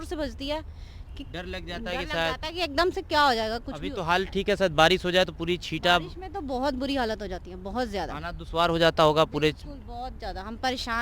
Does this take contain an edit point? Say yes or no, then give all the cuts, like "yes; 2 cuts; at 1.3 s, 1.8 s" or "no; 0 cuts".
no; 0 cuts